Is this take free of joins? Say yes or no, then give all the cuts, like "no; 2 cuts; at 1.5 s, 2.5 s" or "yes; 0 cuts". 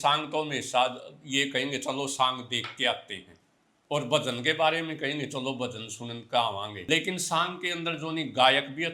no; 1 cut; at 6.8 s